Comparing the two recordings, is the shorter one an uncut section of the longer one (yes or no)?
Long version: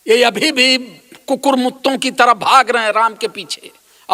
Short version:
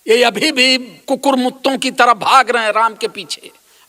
no